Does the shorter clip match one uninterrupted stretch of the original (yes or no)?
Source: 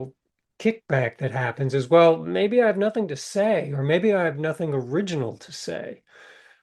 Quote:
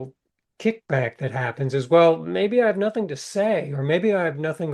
yes